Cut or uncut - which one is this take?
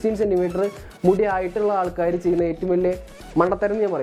uncut